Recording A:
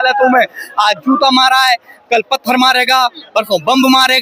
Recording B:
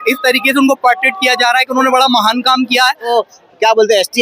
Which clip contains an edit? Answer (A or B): B